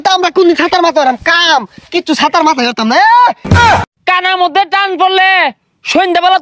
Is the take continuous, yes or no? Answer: no